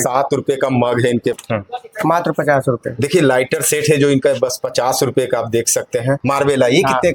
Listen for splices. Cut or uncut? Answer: cut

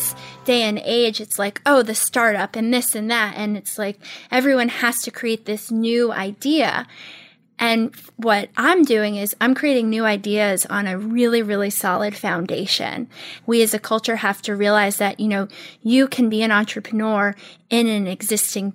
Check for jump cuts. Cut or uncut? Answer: cut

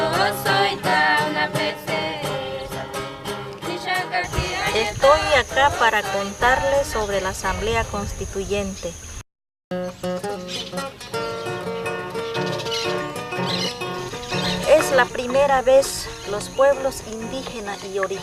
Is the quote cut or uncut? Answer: cut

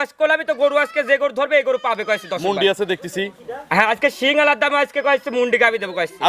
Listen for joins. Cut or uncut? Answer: uncut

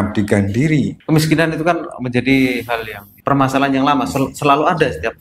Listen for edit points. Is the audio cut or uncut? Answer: cut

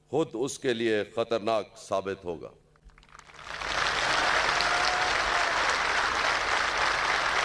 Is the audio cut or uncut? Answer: uncut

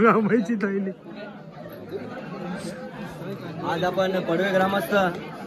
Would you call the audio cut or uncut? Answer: uncut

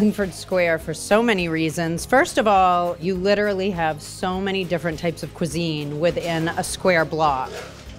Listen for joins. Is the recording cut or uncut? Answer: uncut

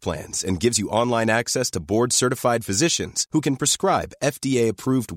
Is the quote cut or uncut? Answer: uncut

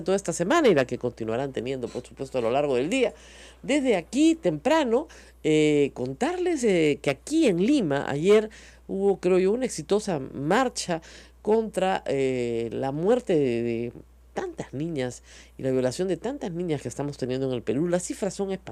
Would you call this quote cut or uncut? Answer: uncut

